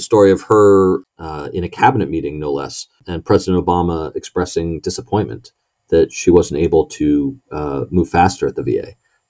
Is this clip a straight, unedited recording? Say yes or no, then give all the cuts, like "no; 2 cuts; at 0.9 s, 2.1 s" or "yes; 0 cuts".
no; 2 cuts; at 1.1 s, 3.1 s